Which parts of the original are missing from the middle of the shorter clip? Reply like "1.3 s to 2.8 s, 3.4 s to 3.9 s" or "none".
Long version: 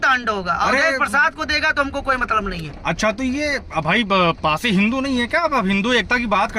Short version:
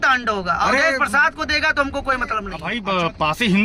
2.6 s to 3.9 s